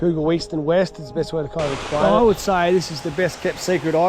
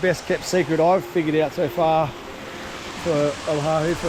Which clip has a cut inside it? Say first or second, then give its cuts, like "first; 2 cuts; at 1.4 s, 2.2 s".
first; 1 cut; at 2.0 s